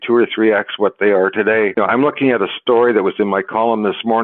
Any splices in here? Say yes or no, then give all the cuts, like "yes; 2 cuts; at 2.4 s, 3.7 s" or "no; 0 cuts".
yes; 1 cut; at 1.7 s